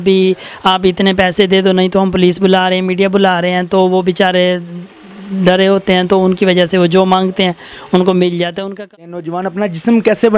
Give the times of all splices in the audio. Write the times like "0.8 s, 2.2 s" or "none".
8.9 s